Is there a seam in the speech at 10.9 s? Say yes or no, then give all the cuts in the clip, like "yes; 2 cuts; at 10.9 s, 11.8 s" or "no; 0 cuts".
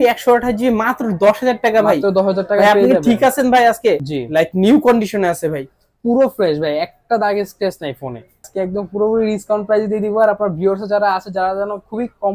no; 2 cuts; at 4.1 s, 8.5 s